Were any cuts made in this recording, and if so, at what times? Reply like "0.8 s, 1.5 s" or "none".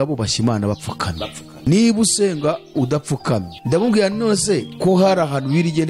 1.5 s, 3.5 s, 4.7 s